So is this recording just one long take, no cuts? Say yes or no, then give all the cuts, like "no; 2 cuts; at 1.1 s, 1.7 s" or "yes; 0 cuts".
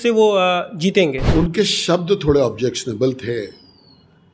no; 1 cut; at 1.3 s